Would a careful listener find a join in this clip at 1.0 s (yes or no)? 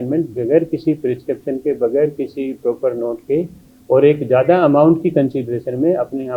no